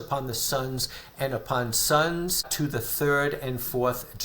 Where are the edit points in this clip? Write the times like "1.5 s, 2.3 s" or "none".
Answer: 2.5 s